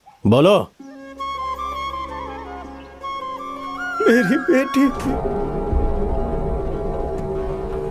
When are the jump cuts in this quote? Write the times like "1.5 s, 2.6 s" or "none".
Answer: 5.0 s